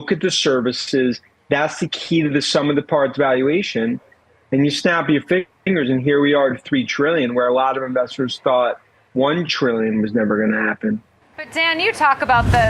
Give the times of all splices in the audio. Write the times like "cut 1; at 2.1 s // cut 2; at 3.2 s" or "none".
none